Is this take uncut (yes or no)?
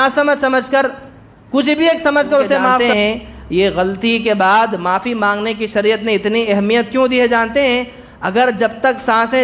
no